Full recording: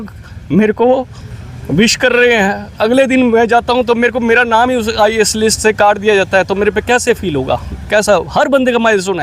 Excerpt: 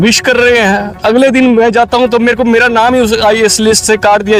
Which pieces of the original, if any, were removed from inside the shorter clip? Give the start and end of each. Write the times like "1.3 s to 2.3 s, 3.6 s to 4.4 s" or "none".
none